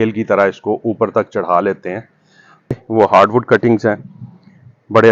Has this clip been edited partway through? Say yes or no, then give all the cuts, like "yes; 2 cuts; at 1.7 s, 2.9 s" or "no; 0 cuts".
yes; 1 cut; at 2.7 s